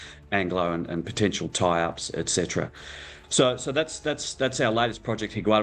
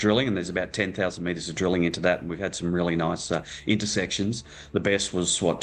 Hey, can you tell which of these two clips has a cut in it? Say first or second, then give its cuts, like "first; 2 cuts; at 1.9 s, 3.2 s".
first; 1 cut; at 3.2 s